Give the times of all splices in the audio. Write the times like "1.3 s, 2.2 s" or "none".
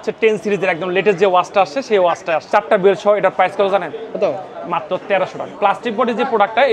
2.4 s, 5.5 s